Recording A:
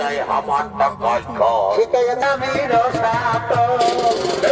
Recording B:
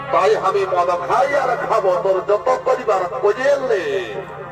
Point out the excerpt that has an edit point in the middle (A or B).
A